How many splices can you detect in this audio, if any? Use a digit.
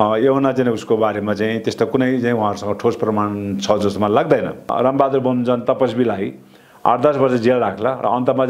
1